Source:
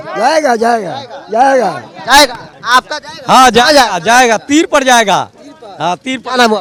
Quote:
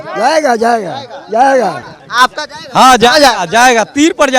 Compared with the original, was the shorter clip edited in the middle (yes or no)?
yes